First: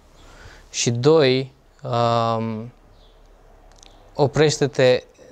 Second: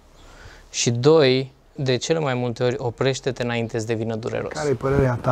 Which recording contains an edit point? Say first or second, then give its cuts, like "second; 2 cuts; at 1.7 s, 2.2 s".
second; 2 cuts; at 1.8 s, 4.5 s